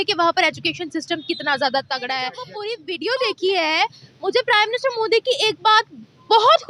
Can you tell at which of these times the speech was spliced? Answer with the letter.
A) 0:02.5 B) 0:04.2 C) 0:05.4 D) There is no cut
A